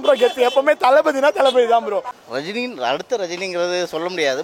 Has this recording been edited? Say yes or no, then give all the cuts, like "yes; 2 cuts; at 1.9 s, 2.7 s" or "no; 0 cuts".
yes; 1 cut; at 2.1 s